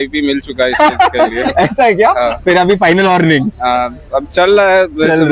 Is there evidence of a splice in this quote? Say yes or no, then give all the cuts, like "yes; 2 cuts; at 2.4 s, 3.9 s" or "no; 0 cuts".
no; 0 cuts